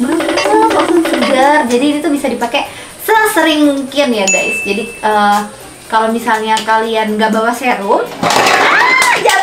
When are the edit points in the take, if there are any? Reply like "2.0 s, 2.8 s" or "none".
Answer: none